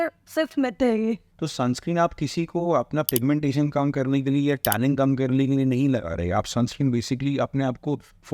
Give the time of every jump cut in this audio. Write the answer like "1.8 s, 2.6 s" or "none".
1.3 s